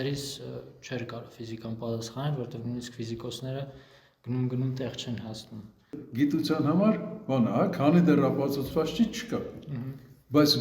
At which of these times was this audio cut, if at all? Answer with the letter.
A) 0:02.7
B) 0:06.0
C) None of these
B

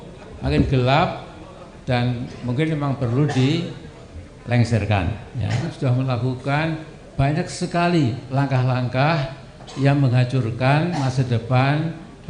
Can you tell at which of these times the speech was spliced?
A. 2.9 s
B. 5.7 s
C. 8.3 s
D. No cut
B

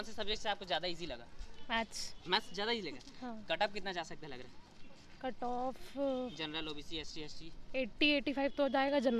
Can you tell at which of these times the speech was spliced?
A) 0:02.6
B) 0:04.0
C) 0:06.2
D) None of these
D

